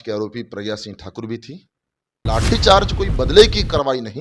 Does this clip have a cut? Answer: yes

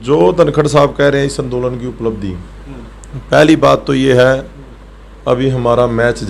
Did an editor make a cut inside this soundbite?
no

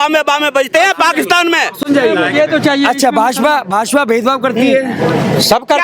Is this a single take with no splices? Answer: yes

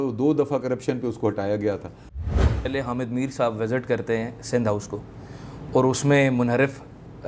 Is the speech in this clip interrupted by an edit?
yes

